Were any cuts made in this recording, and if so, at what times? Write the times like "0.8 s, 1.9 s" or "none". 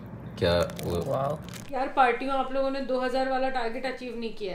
1.7 s